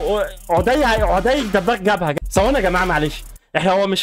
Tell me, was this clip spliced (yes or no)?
yes